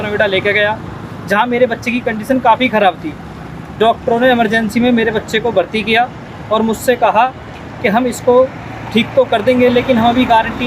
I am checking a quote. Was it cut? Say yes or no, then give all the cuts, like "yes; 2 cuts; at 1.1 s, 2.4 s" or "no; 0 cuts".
no; 0 cuts